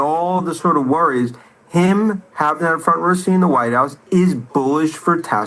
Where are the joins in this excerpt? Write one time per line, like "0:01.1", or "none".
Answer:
none